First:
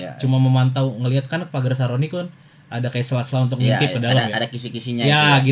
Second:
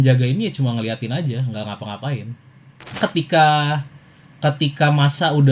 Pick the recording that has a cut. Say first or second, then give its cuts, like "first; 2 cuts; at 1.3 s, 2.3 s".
second; 1 cut; at 3.0 s